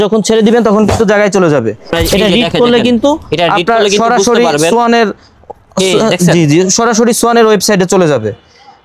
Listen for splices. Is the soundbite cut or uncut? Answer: cut